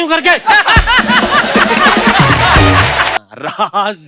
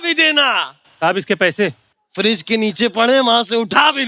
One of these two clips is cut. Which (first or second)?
first